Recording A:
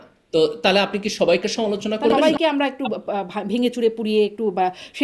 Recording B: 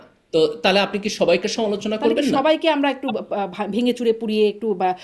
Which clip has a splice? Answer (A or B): A